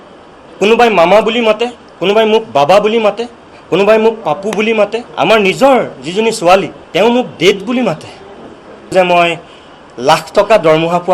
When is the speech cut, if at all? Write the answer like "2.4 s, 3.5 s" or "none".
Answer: 5.0 s, 6.8 s, 8.9 s